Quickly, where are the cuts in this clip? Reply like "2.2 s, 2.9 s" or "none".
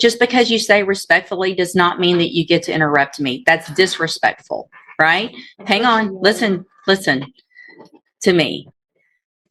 none

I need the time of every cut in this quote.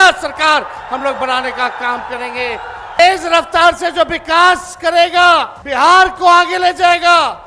3.0 s, 5.6 s

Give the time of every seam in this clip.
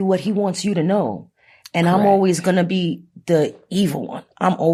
none

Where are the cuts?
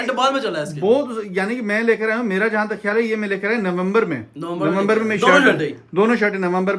none

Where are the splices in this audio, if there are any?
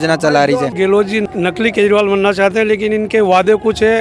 1.2 s

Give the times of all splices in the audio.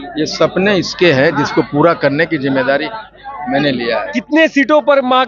4.1 s

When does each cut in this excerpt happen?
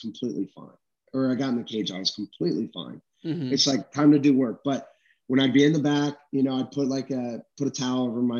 none

